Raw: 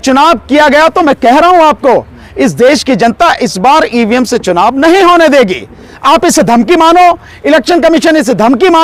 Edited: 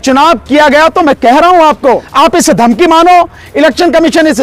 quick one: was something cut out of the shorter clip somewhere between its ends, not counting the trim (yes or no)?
yes